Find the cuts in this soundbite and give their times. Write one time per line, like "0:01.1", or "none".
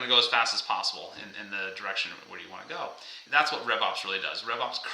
0:03.2